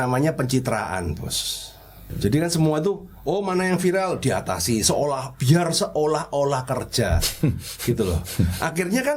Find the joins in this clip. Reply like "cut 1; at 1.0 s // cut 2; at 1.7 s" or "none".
cut 1; at 2.1 s